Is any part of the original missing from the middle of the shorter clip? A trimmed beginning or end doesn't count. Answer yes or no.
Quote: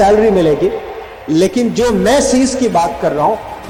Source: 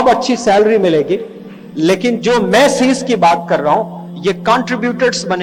no